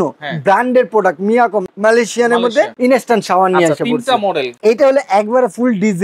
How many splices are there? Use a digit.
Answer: 3